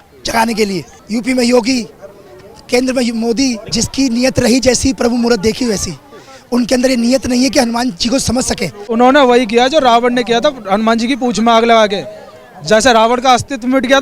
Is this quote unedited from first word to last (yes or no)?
no